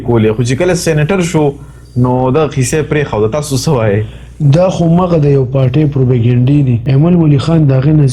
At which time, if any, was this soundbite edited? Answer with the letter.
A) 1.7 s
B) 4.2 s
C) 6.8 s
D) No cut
C